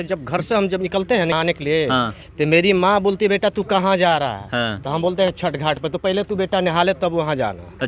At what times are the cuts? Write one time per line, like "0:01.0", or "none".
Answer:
0:01.3